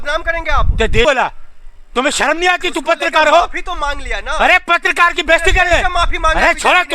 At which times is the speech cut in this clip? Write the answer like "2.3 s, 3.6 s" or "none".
1.1 s

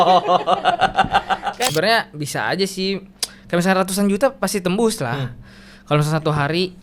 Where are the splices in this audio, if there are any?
1.6 s

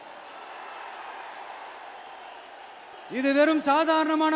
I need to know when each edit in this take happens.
2.9 s

